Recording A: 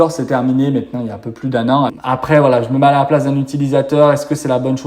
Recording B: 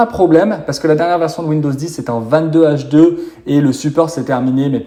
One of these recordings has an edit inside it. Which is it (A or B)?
A